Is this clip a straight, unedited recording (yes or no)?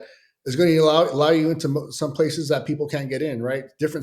yes